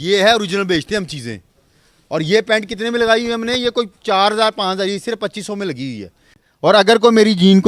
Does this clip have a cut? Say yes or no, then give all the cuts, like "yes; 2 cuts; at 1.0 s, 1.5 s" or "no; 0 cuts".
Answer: yes; 1 cut; at 6.5 s